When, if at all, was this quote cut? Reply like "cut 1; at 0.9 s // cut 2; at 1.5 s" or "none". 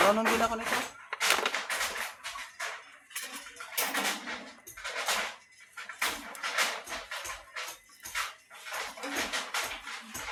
none